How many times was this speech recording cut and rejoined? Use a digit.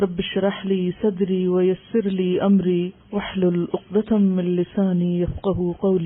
1